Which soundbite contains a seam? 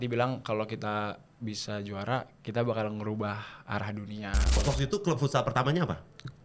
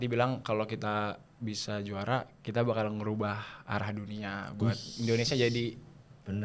first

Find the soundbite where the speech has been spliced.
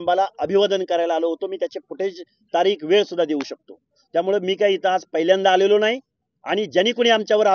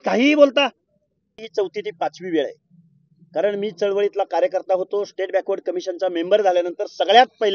second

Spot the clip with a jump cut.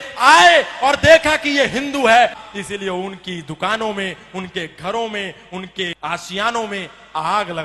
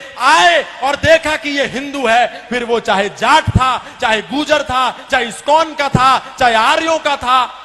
first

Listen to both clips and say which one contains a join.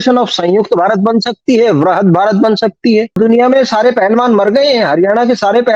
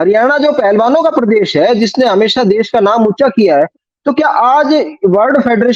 first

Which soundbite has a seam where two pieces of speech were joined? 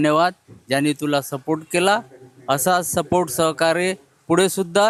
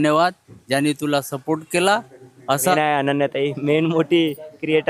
second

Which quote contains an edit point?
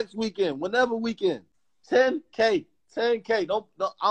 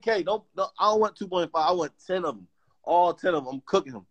first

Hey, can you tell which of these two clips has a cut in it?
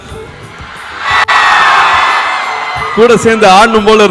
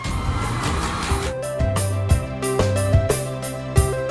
second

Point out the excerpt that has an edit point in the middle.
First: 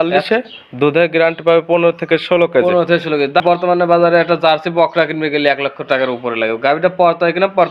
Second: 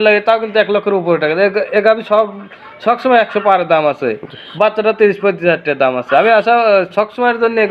first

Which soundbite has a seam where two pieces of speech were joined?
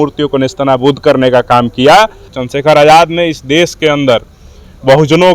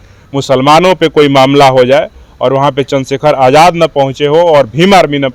first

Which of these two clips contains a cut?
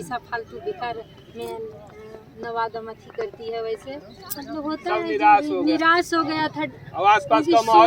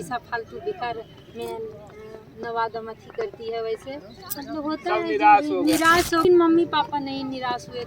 second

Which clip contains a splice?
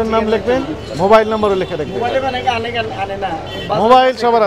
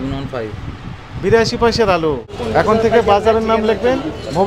second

